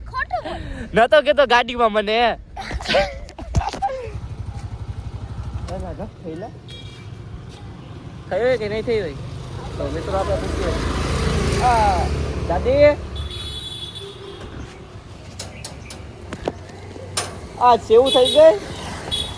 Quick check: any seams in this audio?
yes; 1 cut; at 4.1 s

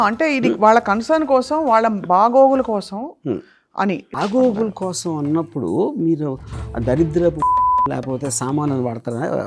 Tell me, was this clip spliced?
yes; 1 cut; at 4.1 s

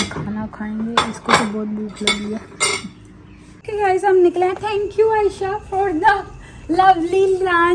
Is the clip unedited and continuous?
no; 1 cut; at 3.6 s

